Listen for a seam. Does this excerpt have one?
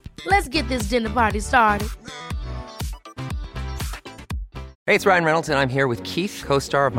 yes; 1 cut; at 4.7 s

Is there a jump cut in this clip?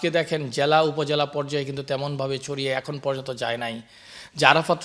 no; 0 cuts

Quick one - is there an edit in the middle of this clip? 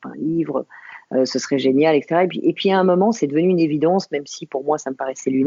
no; 0 cuts

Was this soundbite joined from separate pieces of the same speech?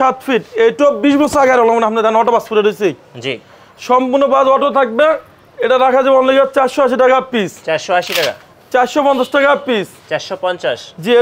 no; 0 cuts

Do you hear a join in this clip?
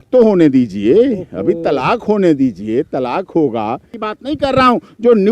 yes; 1 cut; at 4.1 s

